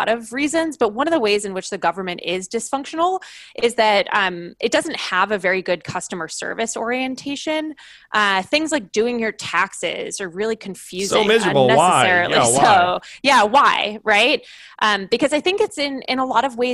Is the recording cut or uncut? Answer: cut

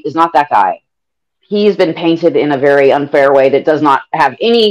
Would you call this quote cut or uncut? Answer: cut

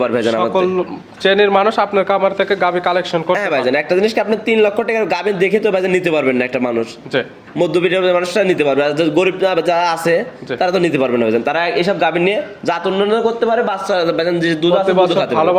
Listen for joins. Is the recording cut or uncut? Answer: uncut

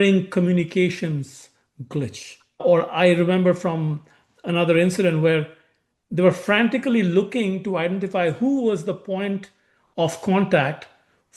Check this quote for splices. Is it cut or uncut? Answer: cut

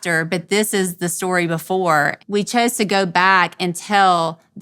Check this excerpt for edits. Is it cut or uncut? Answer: cut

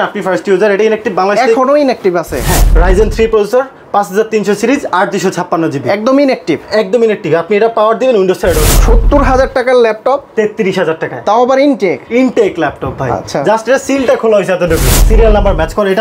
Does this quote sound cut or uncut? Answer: cut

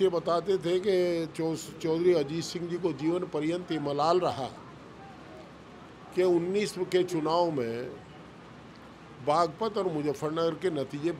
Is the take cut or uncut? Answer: uncut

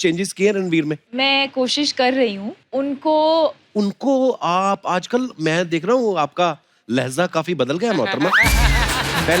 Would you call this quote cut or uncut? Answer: cut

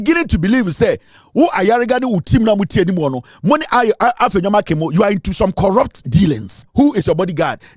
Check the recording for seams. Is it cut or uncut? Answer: cut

